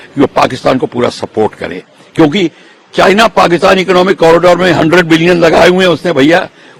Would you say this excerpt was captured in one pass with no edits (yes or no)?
yes